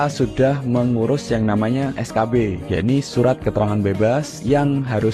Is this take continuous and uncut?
no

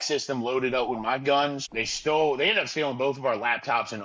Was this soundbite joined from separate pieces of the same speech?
yes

